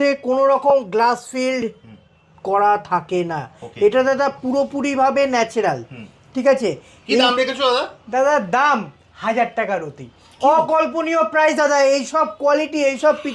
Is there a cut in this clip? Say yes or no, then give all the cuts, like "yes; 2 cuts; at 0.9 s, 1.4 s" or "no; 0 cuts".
no; 0 cuts